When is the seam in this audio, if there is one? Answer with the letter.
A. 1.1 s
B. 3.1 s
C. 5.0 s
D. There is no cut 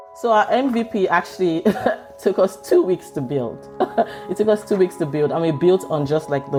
D